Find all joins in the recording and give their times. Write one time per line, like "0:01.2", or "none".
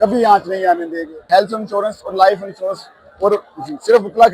0:01.1